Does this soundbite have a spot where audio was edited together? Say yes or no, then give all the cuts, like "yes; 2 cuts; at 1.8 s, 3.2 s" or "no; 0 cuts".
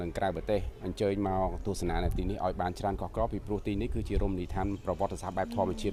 no; 0 cuts